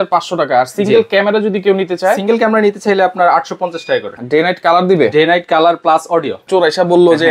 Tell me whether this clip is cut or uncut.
cut